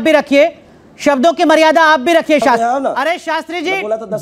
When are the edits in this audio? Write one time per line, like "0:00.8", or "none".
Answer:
0:02.6